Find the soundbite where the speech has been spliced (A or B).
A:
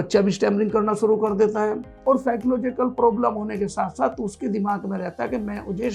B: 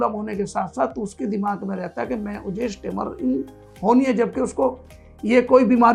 A